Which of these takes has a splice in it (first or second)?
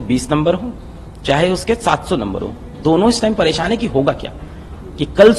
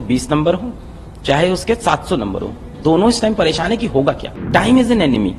second